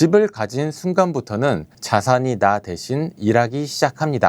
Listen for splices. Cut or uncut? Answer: uncut